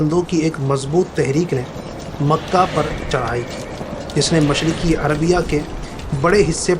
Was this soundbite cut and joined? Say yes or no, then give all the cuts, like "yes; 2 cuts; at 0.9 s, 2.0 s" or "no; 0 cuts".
no; 0 cuts